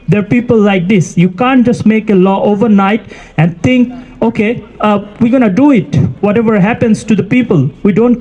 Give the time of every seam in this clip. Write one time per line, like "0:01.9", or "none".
none